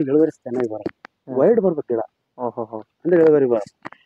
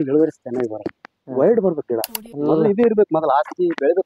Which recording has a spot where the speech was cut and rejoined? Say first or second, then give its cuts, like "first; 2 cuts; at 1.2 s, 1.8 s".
second; 1 cut; at 2.2 s